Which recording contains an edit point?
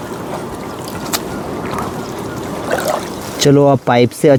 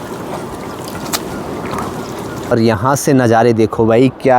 second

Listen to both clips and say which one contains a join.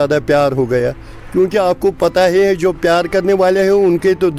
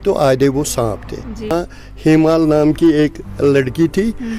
second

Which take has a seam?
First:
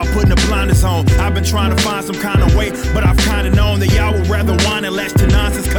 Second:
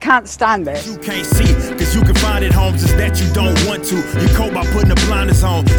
second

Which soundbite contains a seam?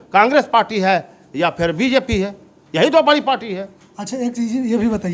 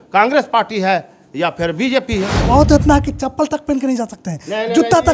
second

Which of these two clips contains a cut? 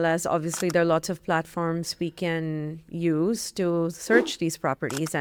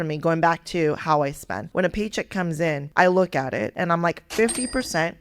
second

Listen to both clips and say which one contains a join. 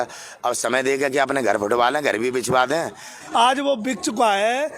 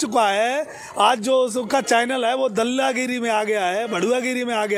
first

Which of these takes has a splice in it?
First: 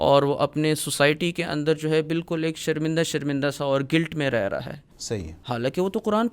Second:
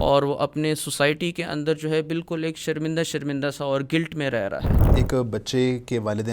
second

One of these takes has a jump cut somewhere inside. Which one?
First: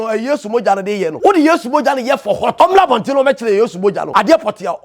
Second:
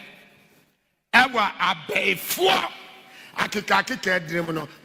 first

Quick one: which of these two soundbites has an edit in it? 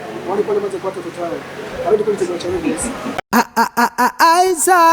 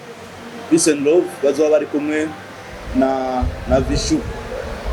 first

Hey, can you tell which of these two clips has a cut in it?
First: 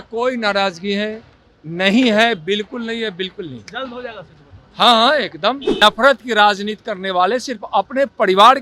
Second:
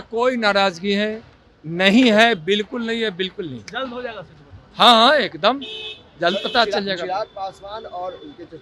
first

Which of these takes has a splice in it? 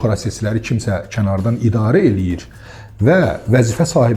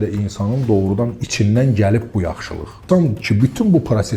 second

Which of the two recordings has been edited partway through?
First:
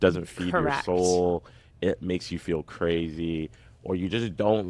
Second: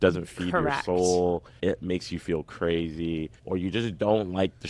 second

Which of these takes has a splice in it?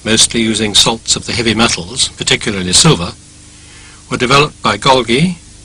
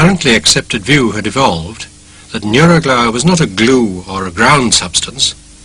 second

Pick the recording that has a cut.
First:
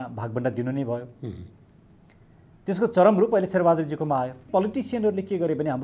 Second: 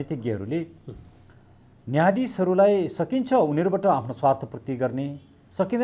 first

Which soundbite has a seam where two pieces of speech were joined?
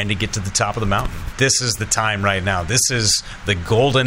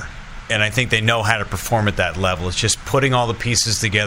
first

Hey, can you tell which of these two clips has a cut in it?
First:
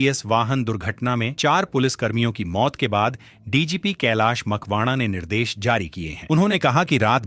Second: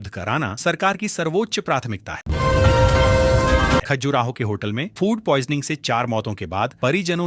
second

